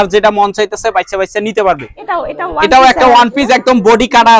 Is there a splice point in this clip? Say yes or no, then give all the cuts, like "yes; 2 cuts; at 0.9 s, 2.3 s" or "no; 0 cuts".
yes; 1 cut; at 1.9 s